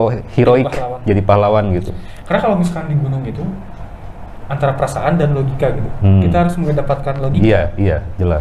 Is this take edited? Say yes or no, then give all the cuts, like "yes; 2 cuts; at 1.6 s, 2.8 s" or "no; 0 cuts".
no; 0 cuts